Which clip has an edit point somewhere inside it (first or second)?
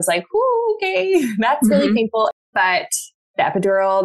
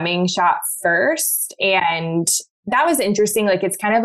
first